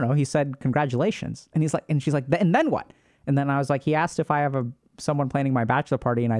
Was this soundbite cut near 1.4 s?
no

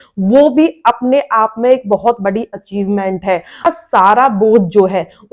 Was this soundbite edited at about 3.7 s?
yes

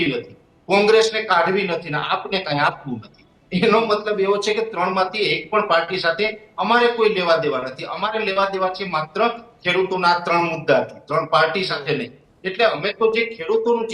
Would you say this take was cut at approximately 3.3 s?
no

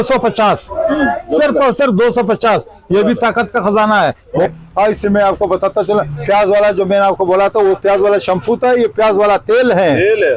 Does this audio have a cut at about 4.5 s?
yes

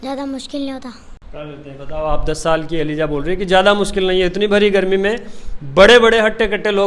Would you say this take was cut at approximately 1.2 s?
no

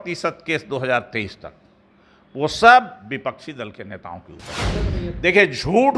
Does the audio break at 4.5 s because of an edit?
yes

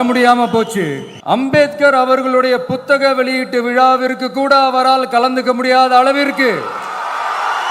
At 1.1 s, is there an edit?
yes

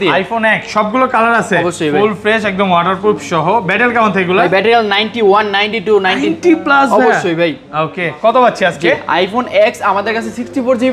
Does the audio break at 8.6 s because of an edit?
no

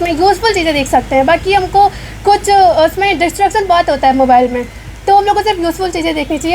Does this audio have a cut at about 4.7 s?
no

